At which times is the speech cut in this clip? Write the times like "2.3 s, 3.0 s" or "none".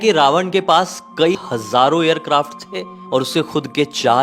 1.3 s